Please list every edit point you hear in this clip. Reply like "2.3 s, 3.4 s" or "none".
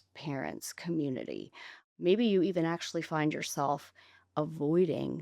1.9 s